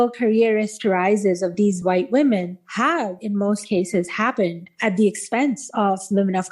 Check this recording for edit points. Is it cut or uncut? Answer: uncut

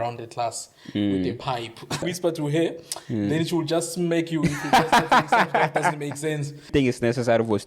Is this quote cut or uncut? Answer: cut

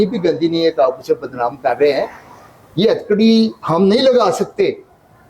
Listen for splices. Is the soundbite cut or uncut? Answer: uncut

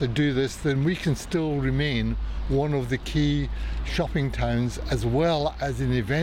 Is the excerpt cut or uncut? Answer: uncut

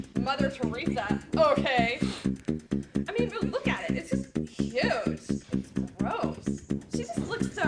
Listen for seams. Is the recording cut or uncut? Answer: uncut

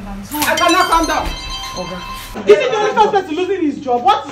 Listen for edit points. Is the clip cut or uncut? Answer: cut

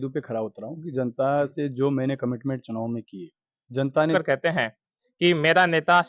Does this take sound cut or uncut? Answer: cut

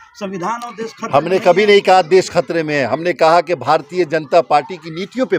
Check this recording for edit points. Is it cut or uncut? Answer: uncut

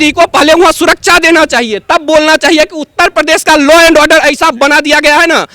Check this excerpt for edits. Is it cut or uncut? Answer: uncut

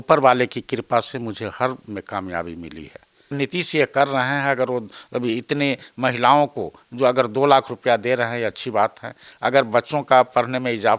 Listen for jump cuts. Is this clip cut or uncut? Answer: cut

